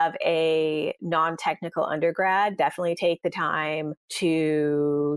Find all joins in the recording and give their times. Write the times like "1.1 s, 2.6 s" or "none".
none